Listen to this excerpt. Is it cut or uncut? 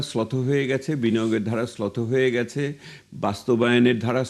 uncut